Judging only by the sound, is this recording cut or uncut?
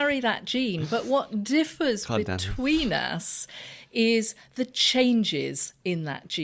uncut